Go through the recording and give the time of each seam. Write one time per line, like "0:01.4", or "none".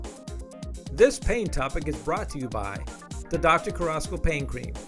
0:00.9